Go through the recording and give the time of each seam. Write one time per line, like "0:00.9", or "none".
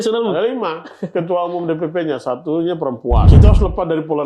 0:03.3